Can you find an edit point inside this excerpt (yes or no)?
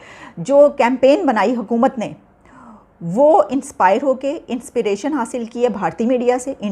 yes